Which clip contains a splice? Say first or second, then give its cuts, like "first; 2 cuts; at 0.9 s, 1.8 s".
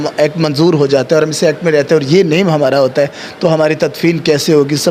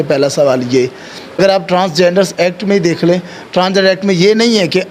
second; 1 cut; at 1.4 s